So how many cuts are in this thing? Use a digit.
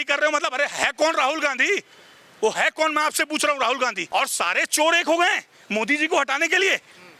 1